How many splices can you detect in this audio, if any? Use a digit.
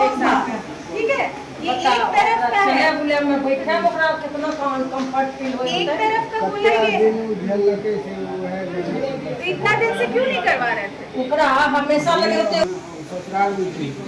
0